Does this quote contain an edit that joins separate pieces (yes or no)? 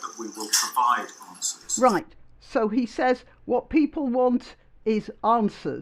no